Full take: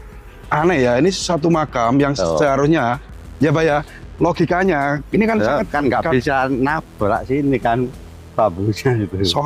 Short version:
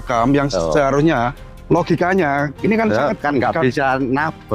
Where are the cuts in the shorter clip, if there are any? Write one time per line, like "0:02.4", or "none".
0:01.5